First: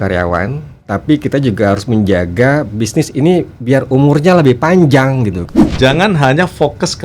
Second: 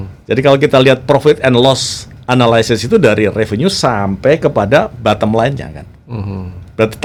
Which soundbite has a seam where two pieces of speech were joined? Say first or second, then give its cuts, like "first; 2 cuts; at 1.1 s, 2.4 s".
first; 1 cut; at 5.4 s